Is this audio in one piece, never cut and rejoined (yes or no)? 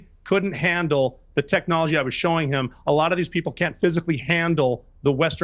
yes